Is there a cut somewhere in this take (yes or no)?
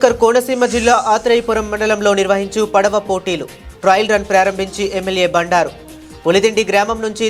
no